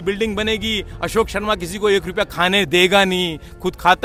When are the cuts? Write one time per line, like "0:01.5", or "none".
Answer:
none